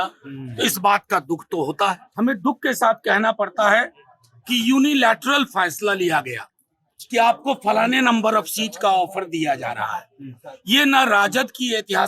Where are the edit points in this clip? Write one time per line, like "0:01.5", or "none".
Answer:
0:02.0